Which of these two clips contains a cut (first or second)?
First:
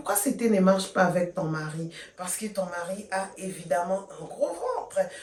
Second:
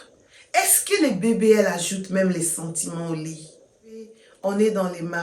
second